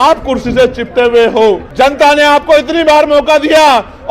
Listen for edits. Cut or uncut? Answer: cut